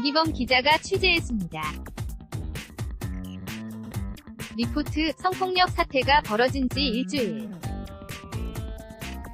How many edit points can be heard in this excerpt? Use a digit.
3